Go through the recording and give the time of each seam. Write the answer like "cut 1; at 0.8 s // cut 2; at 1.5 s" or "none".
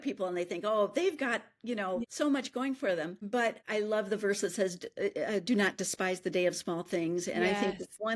cut 1; at 2.1 s // cut 2; at 3.5 s

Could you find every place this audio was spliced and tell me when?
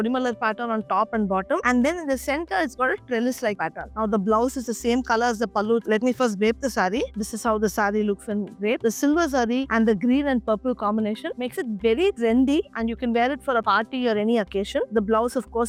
none

